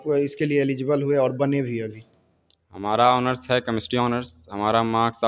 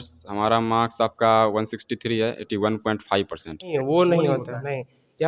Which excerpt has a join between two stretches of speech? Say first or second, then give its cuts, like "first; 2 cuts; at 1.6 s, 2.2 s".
second; 1 cut; at 3.7 s